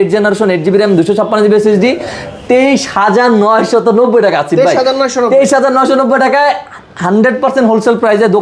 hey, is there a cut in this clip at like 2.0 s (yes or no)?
no